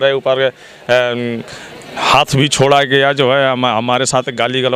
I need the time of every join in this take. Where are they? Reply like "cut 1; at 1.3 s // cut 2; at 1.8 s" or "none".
none